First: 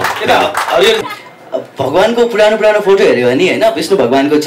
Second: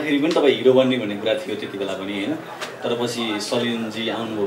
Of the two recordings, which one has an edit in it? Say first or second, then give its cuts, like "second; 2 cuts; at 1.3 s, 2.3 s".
first; 1 cut; at 1.0 s